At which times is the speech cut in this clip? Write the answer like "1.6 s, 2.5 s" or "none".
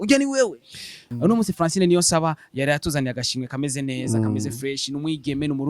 1.1 s